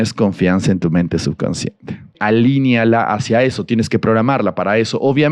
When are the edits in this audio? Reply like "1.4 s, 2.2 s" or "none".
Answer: 2.1 s